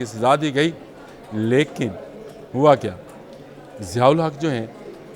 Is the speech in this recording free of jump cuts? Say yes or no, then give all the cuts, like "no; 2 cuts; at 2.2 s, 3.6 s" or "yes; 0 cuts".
yes; 0 cuts